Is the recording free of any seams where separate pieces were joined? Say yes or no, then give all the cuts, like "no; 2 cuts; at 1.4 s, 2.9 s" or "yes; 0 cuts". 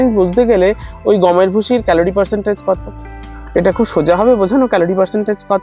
yes; 0 cuts